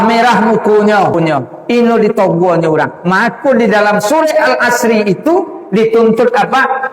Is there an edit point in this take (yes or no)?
yes